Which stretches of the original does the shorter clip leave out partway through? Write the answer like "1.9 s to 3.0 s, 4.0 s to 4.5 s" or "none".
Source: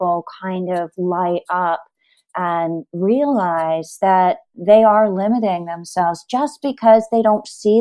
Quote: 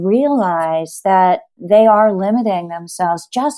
none

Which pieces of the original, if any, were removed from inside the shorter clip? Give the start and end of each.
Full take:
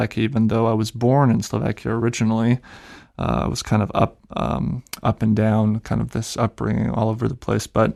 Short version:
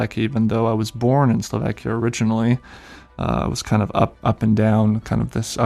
4.2 s to 5.0 s

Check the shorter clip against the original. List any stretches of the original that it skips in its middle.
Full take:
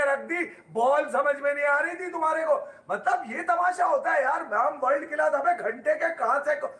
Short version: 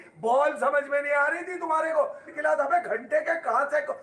2.8 s to 5.1 s

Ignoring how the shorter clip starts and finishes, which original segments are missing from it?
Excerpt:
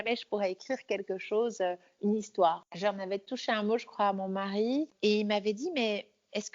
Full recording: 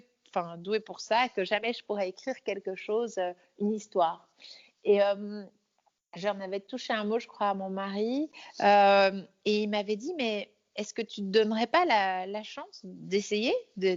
4.2 s to 6.1 s, 8.3 s to 9.3 s

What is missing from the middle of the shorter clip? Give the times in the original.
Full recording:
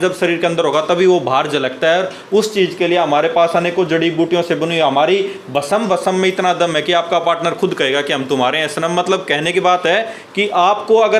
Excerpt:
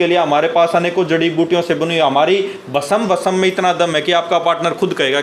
none

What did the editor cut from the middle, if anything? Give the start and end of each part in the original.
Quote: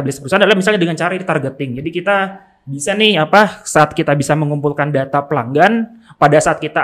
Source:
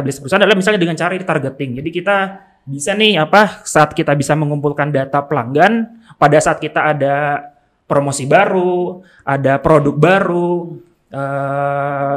none

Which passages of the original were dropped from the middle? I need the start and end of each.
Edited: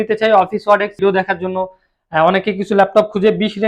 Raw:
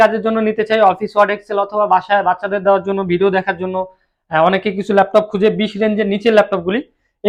1.5 s to 3.2 s

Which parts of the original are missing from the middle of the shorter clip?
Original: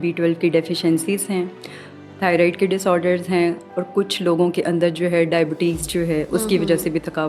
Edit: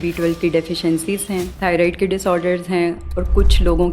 1.5 s to 2.1 s

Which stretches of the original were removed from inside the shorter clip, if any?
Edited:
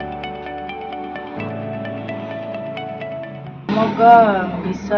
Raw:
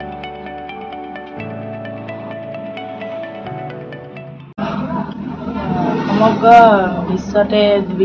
3.7 s to 6.1 s

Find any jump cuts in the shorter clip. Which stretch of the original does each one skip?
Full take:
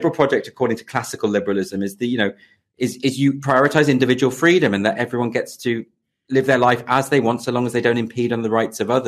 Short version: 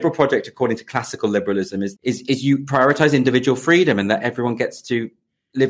1.9 s to 2.7 s

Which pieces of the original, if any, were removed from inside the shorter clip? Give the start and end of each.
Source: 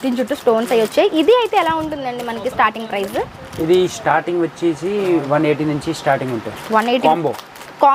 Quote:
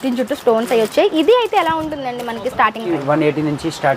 2.9 s to 5.1 s

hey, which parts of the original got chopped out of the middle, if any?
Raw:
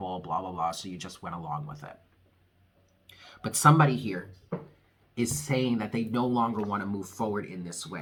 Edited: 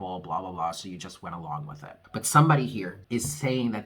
1.9 s to 3.2 s, 4.3 s to 5.0 s

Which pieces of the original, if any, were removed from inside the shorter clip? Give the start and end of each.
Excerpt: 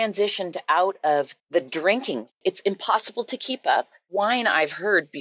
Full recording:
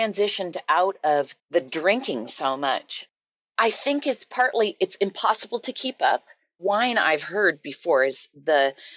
2.4 s to 4.7 s, 6.3 s to 6.5 s

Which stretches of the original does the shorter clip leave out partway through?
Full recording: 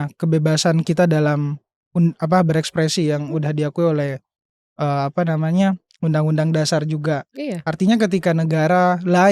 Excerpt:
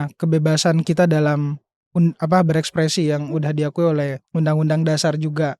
4.2 s to 5.9 s

